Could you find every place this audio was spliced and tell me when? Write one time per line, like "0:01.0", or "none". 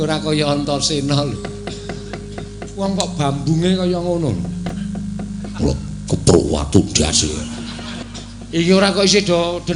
0:04.7
0:08.0